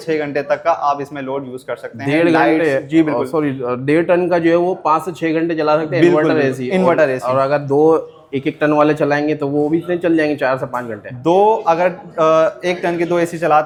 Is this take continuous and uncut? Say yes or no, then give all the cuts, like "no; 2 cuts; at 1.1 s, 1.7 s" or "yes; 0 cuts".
yes; 0 cuts